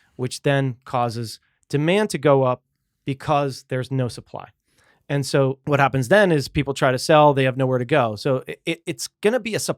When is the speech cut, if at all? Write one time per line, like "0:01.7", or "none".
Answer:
0:05.6